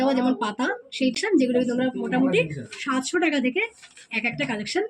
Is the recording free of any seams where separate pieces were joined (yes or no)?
no